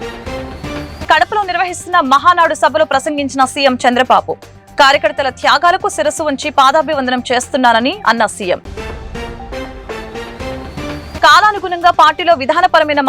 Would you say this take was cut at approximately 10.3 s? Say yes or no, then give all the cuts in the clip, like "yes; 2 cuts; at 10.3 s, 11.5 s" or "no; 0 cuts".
no; 1 cut; at 1.0 s